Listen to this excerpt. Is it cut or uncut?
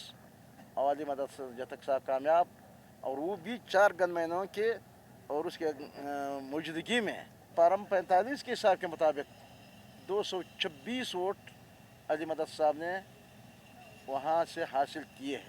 cut